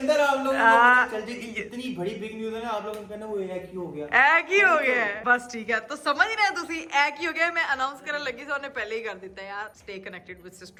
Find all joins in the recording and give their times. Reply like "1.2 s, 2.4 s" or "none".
none